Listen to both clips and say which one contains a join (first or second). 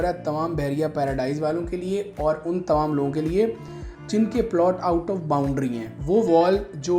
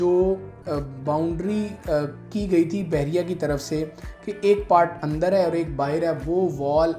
first